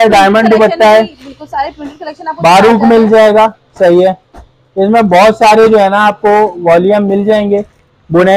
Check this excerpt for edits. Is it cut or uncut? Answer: uncut